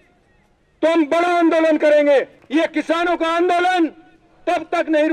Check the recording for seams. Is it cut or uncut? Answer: cut